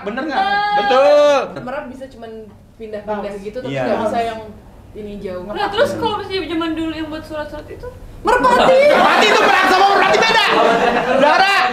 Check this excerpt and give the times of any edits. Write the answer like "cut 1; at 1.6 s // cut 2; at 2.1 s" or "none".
cut 1; at 1.6 s